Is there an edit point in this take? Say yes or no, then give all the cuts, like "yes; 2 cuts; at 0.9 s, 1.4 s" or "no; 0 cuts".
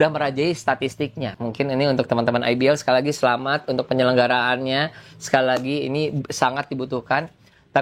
yes; 1 cut; at 1.4 s